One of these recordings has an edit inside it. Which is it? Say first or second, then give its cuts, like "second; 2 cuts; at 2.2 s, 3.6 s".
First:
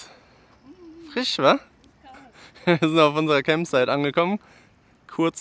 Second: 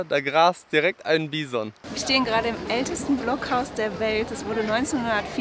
second; 1 cut; at 1.8 s